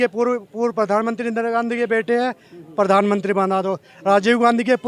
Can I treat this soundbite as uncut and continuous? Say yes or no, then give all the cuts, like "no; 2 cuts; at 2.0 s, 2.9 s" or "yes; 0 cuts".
yes; 0 cuts